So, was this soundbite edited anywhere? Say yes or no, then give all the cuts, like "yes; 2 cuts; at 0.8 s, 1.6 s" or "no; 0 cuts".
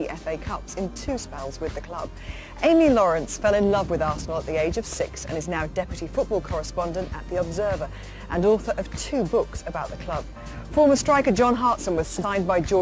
yes; 1 cut; at 3.0 s